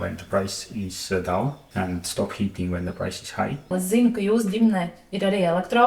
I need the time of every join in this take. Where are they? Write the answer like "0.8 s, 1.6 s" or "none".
1.6 s, 3.6 s